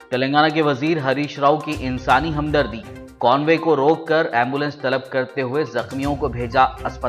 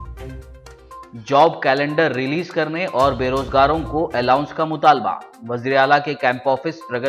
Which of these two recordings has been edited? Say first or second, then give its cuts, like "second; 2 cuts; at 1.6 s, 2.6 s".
second; 1 cut; at 1.0 s